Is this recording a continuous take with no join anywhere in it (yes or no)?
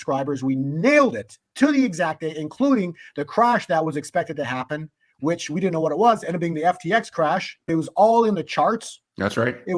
no